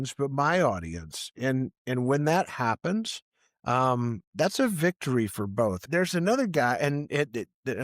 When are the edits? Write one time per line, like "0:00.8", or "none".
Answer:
0:05.8

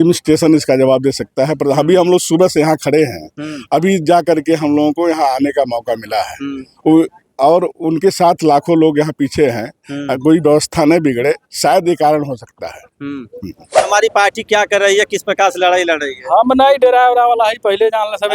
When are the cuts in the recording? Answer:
0:13.9

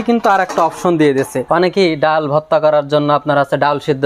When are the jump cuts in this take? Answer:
0:01.4

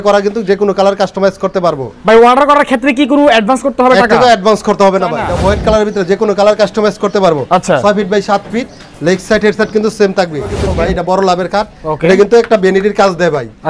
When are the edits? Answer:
0:01.9
0:05.3
0:10.6

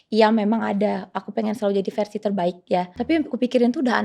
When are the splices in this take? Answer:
0:02.9

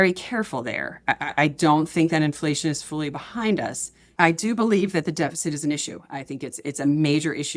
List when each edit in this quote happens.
0:04.0

